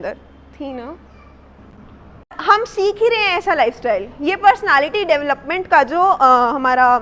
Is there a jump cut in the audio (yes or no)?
yes